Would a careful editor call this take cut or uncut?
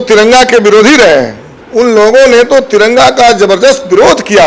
cut